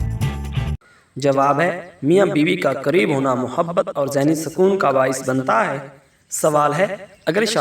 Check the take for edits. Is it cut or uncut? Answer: uncut